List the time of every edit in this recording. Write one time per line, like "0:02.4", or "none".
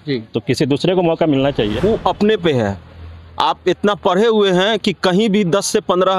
0:01.7